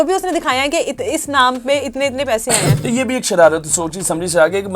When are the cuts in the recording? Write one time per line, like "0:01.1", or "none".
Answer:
0:02.7